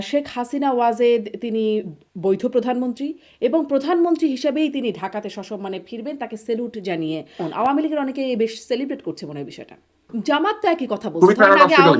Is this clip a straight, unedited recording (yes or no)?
no